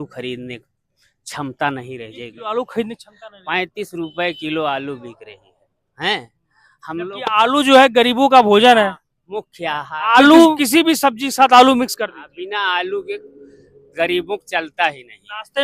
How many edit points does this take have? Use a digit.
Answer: 1